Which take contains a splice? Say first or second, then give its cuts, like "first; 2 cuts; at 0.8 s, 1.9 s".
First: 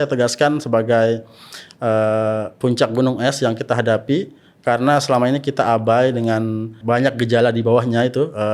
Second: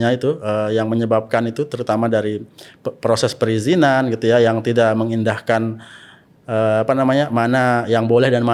first; 1 cut; at 6.8 s